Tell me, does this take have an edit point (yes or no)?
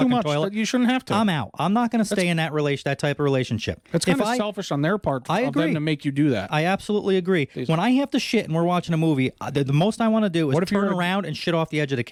no